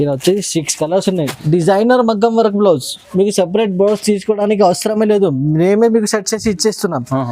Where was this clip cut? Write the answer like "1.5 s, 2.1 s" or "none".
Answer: 1.4 s

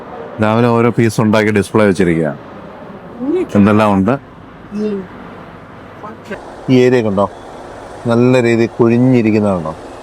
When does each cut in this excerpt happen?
6.3 s

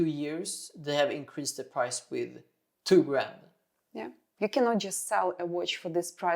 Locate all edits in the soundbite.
4.2 s

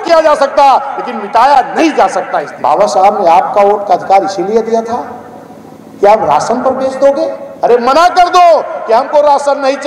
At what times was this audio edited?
2.4 s, 7.4 s

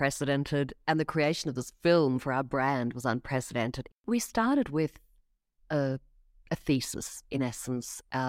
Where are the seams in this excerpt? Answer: 3.9 s

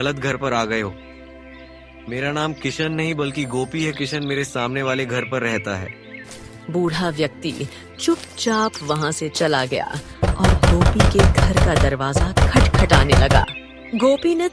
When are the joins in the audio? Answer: none

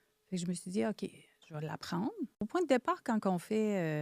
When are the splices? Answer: 2.4 s

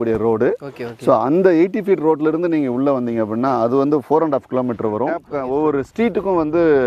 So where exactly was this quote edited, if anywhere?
5.4 s

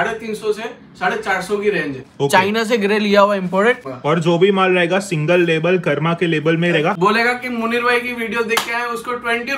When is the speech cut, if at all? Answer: 2.0 s, 3.9 s, 7.0 s

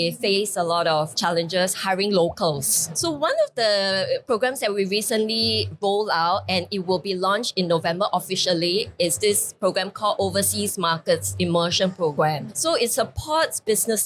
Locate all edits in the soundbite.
2.9 s

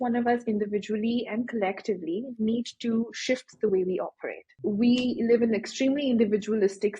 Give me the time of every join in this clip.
4.5 s

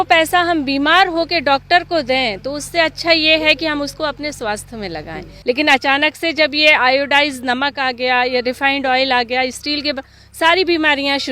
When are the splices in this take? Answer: 5.3 s

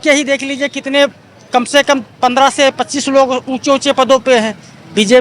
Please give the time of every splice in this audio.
none

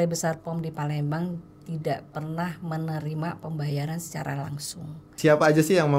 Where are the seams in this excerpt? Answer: 5.1 s

